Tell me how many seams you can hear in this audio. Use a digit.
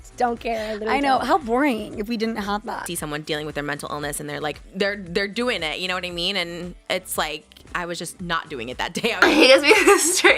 2